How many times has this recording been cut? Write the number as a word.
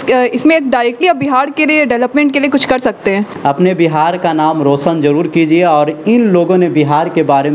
one